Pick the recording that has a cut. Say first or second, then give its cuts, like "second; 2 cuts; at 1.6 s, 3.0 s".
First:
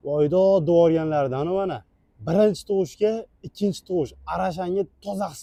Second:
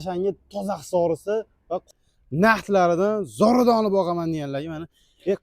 second; 1 cut; at 1.9 s